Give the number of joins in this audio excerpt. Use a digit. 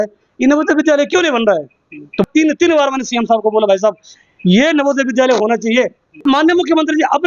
2